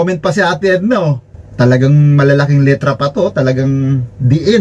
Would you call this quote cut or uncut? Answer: cut